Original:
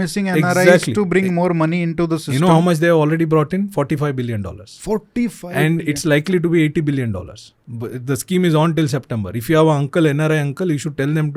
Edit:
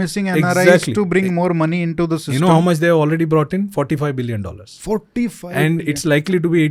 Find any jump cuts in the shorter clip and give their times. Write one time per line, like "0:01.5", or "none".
none